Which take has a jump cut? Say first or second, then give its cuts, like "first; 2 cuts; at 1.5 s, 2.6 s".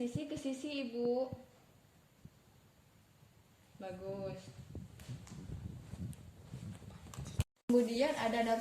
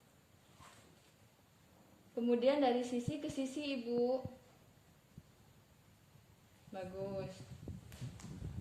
first; 1 cut; at 7.6 s